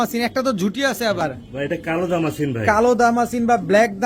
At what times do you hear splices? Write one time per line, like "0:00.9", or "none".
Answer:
0:01.2